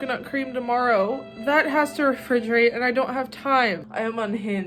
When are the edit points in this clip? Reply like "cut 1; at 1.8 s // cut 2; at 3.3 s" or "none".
cut 1; at 3.8 s